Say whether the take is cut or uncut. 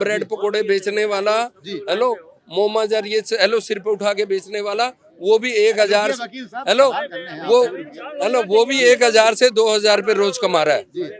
uncut